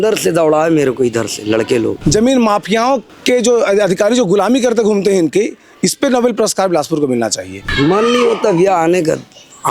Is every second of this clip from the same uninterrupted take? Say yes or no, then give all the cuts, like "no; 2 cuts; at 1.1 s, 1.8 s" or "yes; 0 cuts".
no; 3 cuts; at 2.0 s, 3.1 s, 7.6 s